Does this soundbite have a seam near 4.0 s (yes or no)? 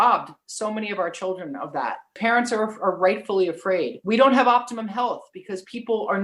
yes